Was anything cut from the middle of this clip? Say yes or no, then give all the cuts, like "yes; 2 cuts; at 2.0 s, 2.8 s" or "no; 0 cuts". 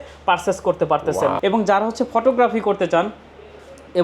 yes; 1 cut; at 1.4 s